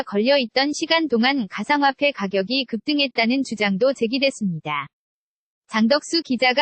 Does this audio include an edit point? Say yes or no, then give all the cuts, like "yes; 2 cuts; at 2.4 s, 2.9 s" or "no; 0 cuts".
no; 0 cuts